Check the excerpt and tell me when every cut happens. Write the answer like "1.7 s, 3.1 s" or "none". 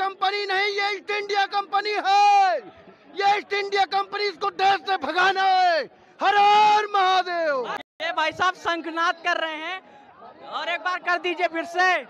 7.8 s